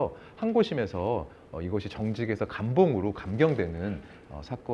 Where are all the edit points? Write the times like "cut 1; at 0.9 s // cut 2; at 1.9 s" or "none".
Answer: none